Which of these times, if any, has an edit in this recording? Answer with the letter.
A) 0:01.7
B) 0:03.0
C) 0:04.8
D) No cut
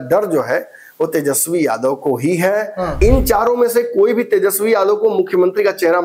B